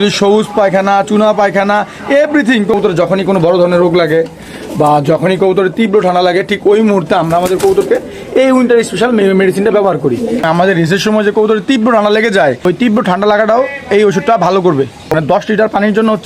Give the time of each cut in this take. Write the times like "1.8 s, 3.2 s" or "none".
2.7 s, 10.4 s, 15.1 s